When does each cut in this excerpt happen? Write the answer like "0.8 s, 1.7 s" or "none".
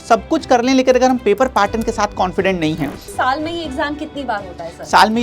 3.1 s